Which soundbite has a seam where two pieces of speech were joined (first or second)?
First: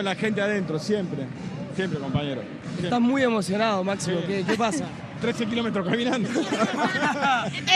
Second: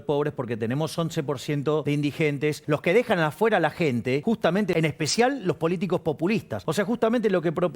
second